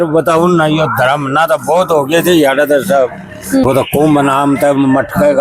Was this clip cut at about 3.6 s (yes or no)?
yes